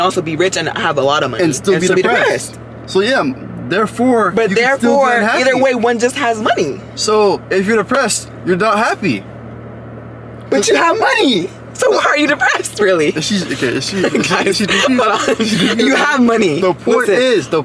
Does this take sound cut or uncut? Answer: uncut